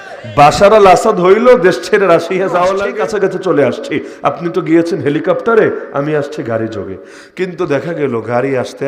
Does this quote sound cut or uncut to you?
cut